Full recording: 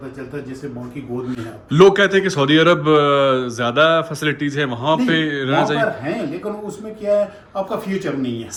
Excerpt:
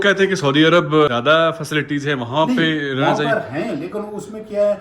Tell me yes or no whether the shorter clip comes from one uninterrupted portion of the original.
no